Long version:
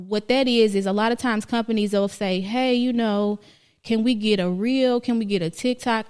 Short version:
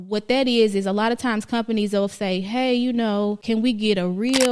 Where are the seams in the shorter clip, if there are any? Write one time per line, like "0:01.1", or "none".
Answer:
0:03.4

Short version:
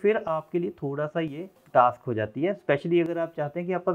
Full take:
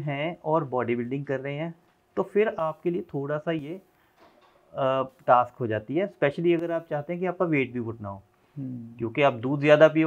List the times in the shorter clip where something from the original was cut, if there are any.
0:01.6

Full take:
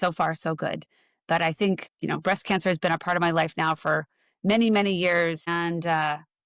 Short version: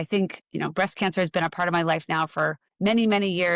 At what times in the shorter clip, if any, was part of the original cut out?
0:02.6

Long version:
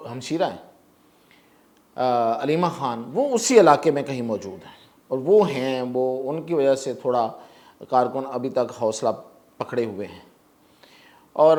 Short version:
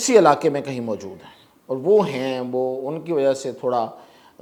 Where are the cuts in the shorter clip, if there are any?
none

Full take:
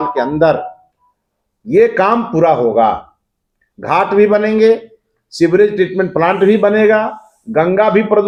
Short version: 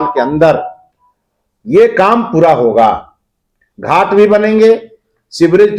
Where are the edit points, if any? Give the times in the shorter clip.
none

